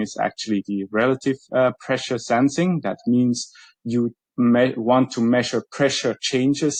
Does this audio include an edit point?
no; 0 cuts

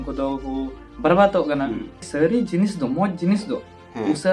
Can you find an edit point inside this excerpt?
yes; 1 cut; at 1.9 s

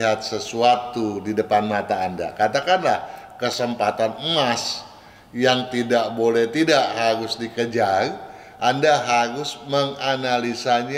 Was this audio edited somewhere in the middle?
no; 0 cuts

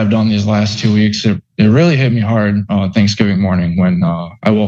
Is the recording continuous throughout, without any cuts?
yes; 0 cuts

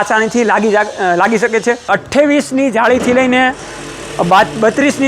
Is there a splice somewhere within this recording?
yes; 1 cut; at 1.9 s

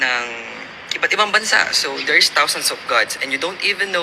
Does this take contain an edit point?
no; 0 cuts

